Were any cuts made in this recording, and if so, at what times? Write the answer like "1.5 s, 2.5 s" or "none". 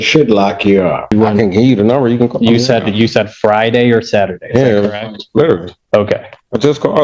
1.1 s

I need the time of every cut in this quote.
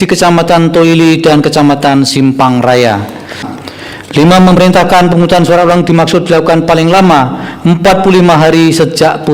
3.5 s

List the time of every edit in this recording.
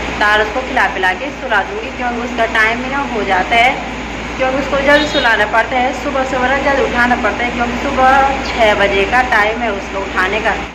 none

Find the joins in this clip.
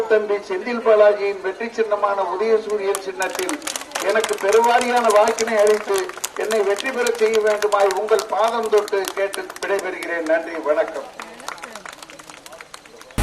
none

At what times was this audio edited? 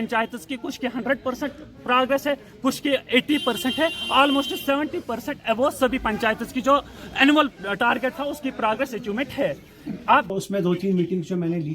10.3 s

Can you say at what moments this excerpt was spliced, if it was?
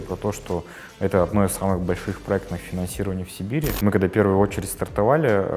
3.7 s

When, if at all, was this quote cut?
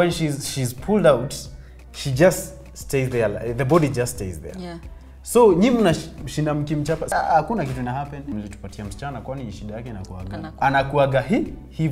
7.0 s, 8.2 s, 10.5 s

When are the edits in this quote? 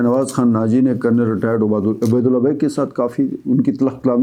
none

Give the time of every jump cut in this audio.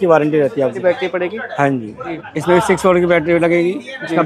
0.8 s, 2.1 s

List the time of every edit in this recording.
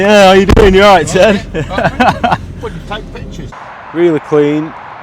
3.7 s

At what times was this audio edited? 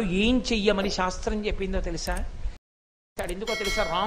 3.0 s

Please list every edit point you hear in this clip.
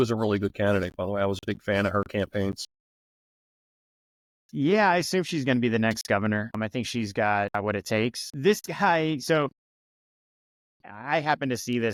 none

